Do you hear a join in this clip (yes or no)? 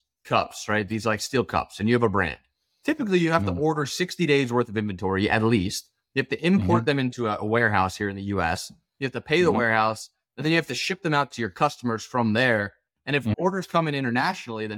no